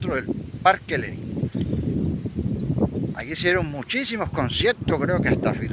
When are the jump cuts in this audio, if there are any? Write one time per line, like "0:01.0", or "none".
none